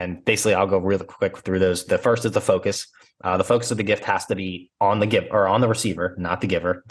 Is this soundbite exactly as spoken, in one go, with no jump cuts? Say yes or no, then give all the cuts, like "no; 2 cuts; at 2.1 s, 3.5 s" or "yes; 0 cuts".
yes; 0 cuts